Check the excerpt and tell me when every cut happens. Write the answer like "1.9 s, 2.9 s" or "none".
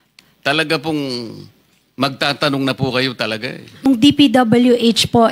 3.8 s